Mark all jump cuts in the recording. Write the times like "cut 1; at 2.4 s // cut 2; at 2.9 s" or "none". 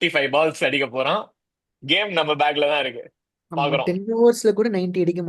none